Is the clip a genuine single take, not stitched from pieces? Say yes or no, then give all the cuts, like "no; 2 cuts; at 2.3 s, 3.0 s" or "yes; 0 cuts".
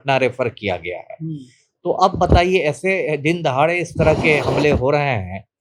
yes; 0 cuts